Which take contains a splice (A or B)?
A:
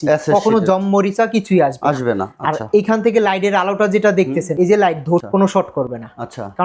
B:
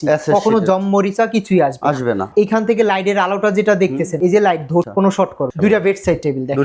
B